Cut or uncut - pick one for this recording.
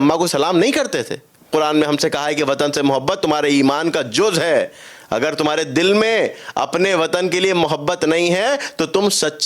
cut